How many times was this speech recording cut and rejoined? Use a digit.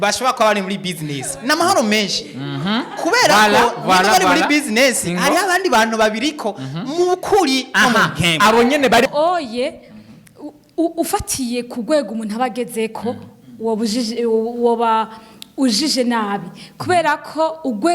1